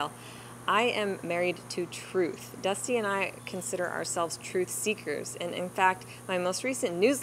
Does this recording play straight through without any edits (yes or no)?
yes